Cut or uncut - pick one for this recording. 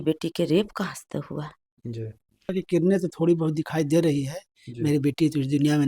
cut